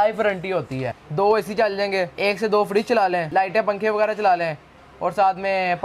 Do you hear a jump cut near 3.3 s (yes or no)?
yes